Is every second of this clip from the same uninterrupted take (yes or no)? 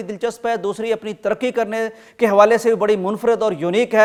yes